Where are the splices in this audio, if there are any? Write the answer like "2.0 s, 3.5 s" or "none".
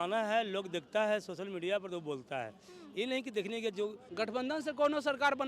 4.0 s